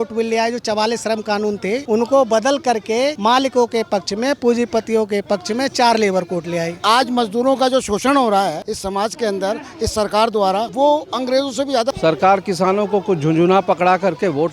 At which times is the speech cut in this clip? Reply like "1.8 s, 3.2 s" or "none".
6.8 s, 11.9 s